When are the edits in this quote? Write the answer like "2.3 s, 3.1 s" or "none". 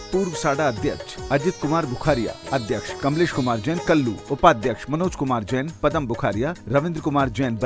2.9 s, 4.2 s